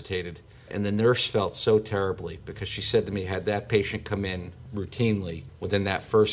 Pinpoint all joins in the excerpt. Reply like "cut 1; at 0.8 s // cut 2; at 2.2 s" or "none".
none